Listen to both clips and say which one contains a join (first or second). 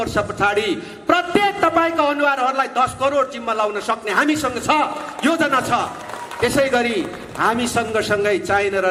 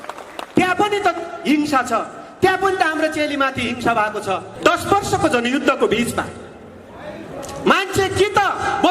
second